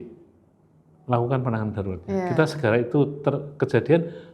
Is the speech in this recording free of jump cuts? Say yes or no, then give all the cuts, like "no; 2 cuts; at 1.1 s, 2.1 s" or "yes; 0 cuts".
yes; 0 cuts